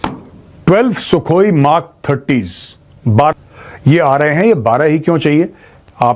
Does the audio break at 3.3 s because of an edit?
yes; 1 cut; at 3.3 s

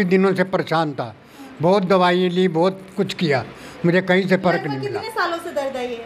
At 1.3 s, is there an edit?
no; 0 cuts

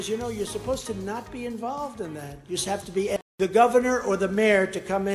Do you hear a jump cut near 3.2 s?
yes; 1 cut; at 3.2 s

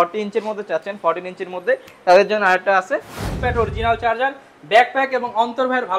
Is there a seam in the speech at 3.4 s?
yes; 1 cut; at 3.4 s

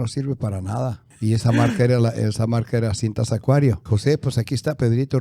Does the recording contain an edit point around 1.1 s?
no; 1 cut; at 3.8 s

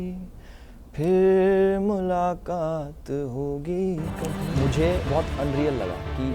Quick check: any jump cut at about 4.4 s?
yes; 1 cut; at 4.4 s

